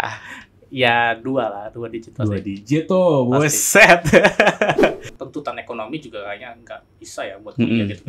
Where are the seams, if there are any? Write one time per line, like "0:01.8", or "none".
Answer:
0:05.1